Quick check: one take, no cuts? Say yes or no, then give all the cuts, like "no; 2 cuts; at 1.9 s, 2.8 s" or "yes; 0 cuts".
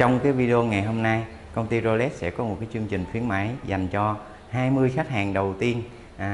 yes; 0 cuts